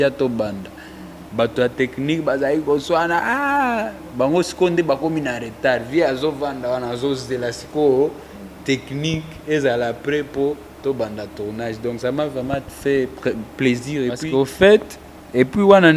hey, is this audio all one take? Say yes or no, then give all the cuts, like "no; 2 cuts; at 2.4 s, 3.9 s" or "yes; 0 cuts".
no; 1 cut; at 14.2 s